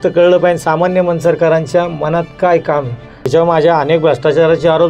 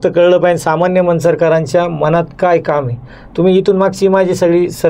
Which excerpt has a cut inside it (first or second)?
first